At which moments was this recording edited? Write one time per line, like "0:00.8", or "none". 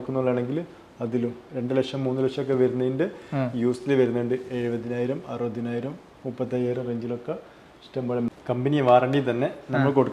0:08.3